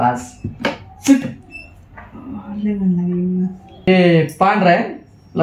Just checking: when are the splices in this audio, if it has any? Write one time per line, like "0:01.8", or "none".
0:03.9